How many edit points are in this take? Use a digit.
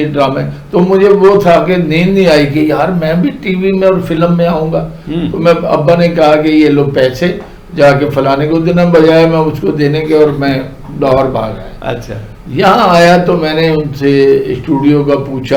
0